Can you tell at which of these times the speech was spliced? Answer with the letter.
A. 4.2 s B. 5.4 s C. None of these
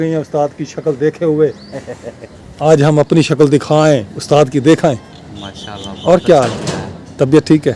C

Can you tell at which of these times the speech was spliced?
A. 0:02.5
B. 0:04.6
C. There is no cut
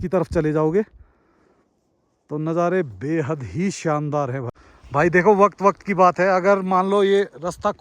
B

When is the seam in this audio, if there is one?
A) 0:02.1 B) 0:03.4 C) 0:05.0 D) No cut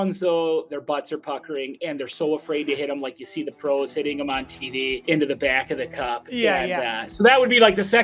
C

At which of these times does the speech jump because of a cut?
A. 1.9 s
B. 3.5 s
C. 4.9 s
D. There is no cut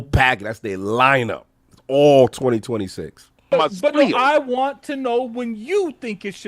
B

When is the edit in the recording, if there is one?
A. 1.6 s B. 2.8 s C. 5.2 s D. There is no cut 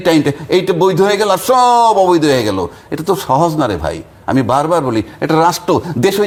D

